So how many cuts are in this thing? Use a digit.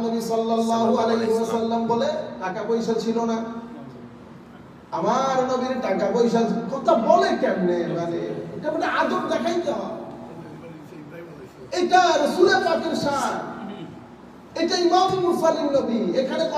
1